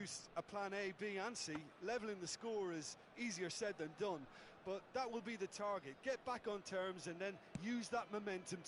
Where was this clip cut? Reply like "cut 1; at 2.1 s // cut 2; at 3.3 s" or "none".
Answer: none